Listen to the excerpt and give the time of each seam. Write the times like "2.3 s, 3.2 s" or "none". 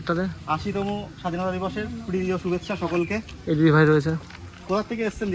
none

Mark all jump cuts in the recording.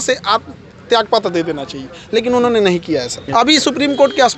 3.2 s

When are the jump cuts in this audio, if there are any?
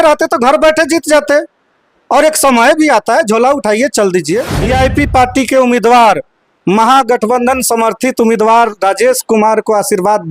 4.5 s

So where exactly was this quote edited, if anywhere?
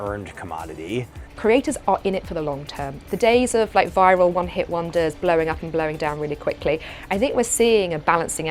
1.2 s

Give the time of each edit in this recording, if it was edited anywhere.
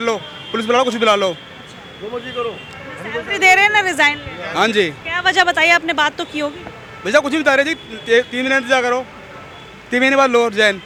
none

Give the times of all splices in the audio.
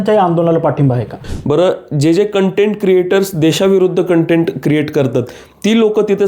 1.3 s

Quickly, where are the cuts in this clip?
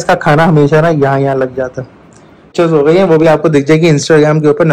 2.5 s

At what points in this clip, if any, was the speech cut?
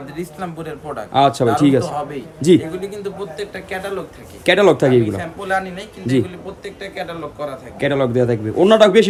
none

